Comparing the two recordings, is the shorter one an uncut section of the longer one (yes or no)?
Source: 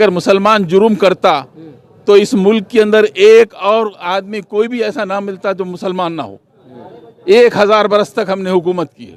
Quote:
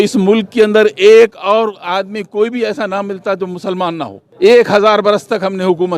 no